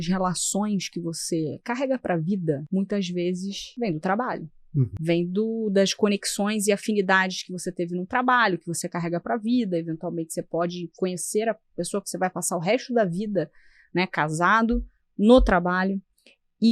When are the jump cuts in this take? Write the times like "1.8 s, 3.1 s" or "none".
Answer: 2.6 s, 3.6 s, 4.9 s